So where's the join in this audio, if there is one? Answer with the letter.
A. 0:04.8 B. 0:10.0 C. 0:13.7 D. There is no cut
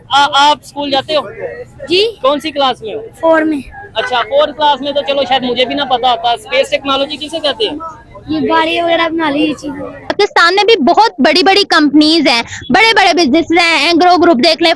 B